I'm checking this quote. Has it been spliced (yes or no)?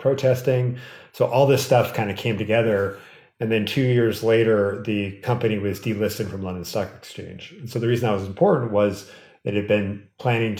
no